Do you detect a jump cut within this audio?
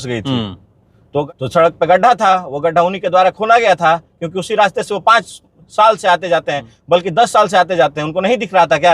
yes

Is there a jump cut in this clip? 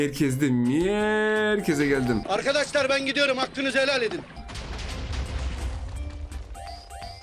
no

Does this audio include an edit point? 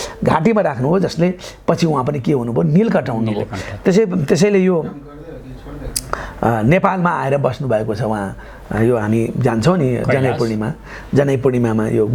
no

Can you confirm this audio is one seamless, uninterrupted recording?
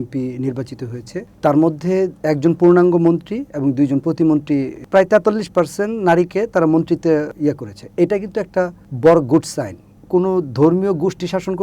no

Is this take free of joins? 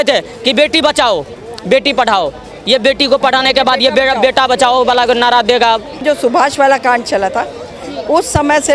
no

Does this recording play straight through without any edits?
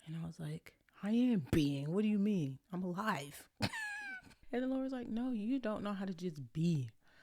no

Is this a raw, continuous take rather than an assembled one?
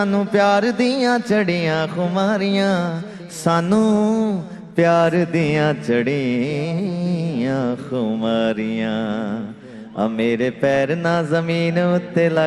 yes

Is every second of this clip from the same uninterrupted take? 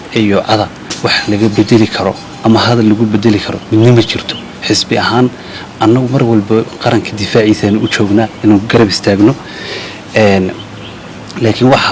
yes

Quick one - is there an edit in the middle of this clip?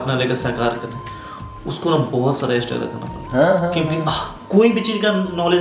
no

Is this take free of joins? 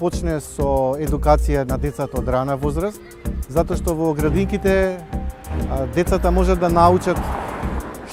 yes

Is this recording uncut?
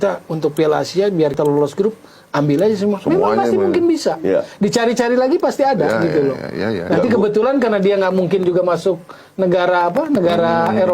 no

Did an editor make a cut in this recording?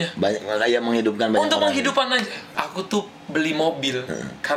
yes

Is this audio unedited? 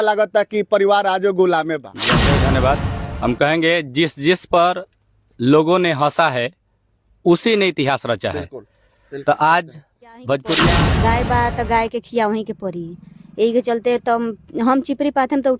no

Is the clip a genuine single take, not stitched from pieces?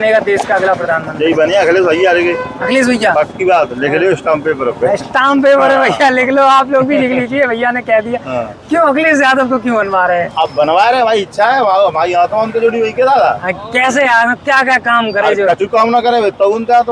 yes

